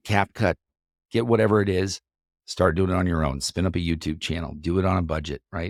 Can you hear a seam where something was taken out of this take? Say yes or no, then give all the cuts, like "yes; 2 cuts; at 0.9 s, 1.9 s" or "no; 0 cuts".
no; 0 cuts